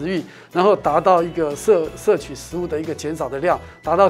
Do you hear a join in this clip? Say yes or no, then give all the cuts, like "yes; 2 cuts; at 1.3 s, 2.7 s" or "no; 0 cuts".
no; 0 cuts